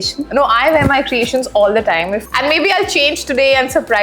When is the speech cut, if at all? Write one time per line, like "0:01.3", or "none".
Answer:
0:02.2